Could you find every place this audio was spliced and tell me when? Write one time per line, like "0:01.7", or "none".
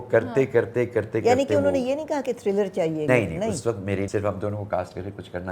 0:03.1
0:04.1